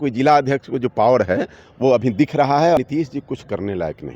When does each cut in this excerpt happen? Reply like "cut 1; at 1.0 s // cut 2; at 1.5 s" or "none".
cut 1; at 2.8 s